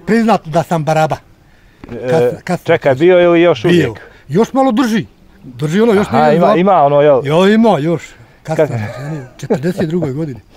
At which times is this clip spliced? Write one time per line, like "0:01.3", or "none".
none